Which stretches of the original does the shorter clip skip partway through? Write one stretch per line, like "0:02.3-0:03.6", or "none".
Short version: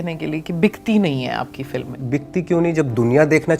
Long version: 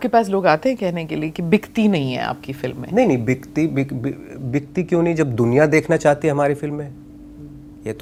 0:02.8-0:04.3